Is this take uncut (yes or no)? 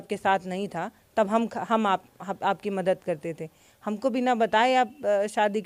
yes